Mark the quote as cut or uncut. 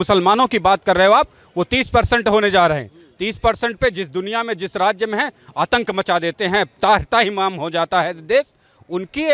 uncut